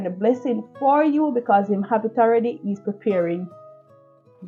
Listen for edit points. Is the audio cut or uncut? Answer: uncut